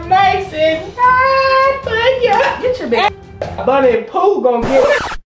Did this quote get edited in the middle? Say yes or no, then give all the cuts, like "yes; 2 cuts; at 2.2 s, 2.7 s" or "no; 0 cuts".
yes; 1 cut; at 3.1 s